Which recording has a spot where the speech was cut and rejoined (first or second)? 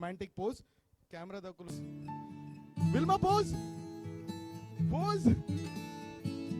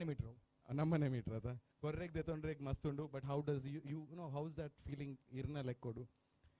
first